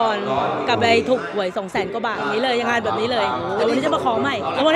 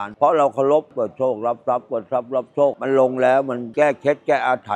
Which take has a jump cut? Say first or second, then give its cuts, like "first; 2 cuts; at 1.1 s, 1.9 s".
second; 2 cuts; at 0.9 s, 2.7 s